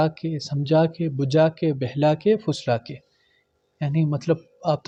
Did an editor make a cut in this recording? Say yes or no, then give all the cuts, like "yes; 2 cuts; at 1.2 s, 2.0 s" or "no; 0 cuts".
no; 0 cuts